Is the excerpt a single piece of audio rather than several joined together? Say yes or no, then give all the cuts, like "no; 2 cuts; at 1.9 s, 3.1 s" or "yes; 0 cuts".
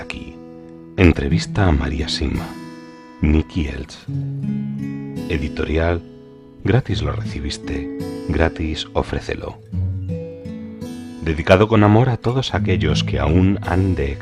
no; 2 cuts; at 9.6 s, 11.2 s